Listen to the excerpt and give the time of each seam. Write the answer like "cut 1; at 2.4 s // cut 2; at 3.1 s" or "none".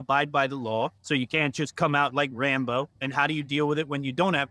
cut 1; at 1.0 s // cut 2; at 3.0 s